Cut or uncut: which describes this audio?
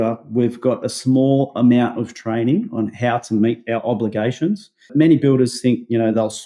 uncut